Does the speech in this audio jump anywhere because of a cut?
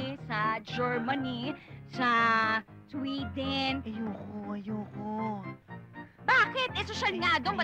yes; 1 cut; at 3.9 s

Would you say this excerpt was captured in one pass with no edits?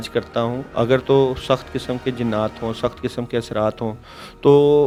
yes; 0 cuts

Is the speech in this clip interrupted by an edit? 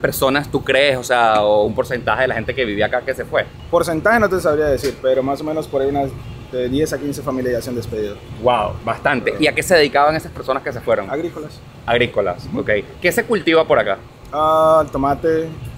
no; 0 cuts

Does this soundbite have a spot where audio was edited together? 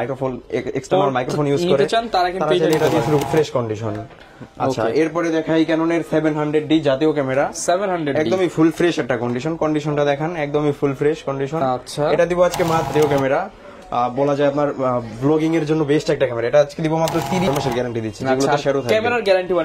yes; 3 cuts; at 3.2 s, 12.9 s, 17.5 s

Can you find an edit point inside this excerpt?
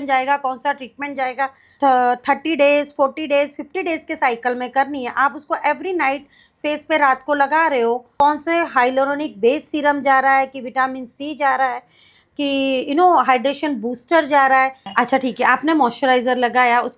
yes; 3 cuts; at 1.6 s, 8.1 s, 14.8 s

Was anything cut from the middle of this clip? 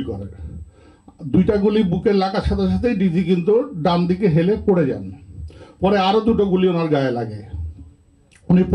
no; 0 cuts

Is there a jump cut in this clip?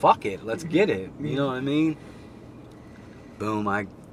no; 0 cuts

